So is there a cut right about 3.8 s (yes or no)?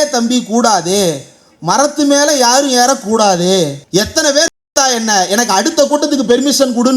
yes